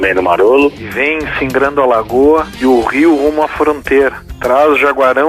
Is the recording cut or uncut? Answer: cut